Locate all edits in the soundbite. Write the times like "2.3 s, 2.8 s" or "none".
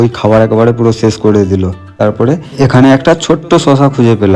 1.9 s